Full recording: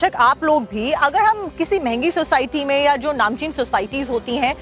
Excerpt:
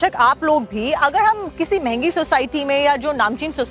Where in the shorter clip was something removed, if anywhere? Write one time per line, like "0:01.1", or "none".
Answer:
none

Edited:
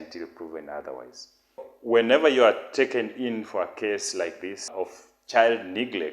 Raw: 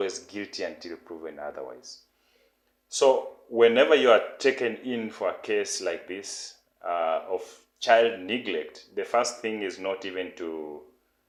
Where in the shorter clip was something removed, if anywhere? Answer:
0:01.7
0:04.7

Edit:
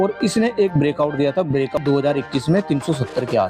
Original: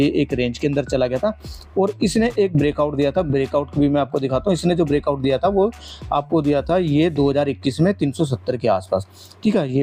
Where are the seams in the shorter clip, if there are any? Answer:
0:01.8

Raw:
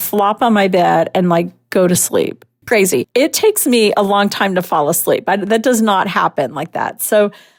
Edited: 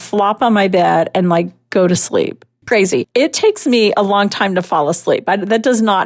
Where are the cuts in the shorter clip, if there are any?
none

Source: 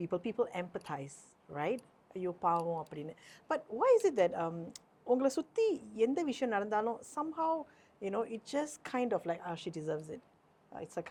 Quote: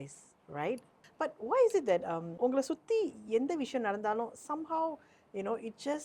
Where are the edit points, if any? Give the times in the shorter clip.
0:01.0
0:02.2

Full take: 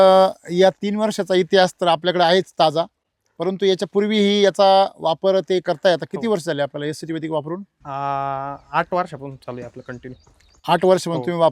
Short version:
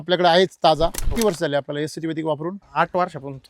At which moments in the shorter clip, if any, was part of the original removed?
0:01.1
0:02.6

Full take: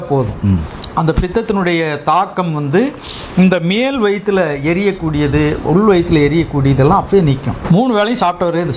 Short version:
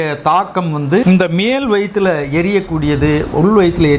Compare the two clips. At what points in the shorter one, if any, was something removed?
0:01.0

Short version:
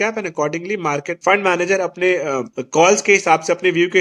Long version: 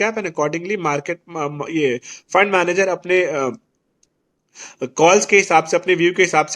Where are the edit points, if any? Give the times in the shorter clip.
0:01.1
0:02.6

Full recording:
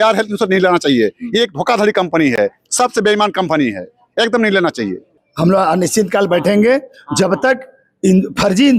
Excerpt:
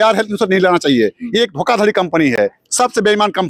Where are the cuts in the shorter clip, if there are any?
none

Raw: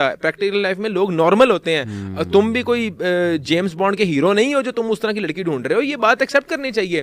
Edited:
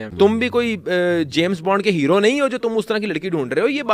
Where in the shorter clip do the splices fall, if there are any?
none

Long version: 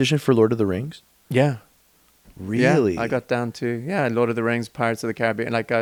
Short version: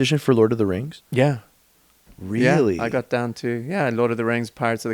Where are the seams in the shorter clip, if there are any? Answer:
0:01.0

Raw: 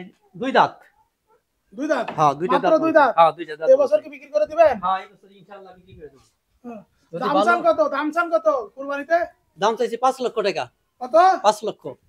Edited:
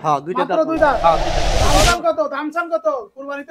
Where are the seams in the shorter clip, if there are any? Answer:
0:01.3

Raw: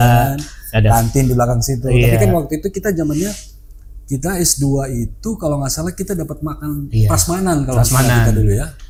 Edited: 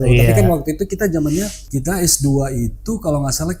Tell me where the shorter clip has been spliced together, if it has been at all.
0:01.6

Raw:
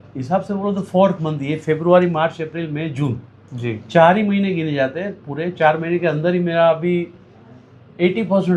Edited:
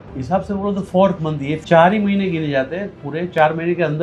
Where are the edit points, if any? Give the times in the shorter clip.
0:01.6

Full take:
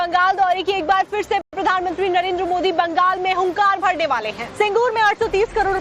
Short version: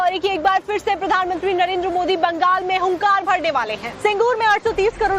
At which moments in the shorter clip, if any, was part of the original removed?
0:01.0

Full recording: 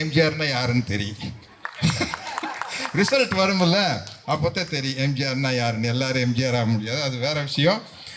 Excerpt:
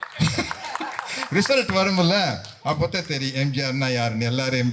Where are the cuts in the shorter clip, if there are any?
none

